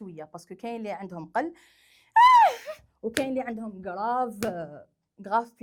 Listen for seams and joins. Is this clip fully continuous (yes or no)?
yes